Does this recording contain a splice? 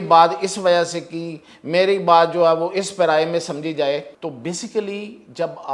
yes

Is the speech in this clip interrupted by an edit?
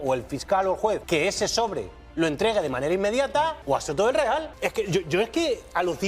yes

